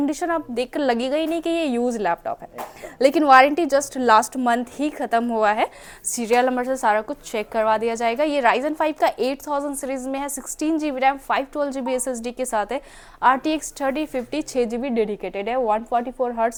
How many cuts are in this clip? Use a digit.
0